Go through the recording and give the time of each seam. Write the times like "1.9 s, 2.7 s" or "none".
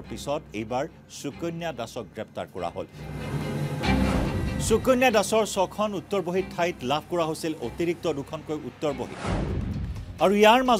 9.1 s